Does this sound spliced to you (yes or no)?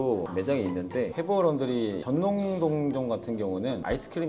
yes